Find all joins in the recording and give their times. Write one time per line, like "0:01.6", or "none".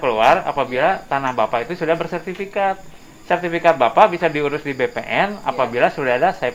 none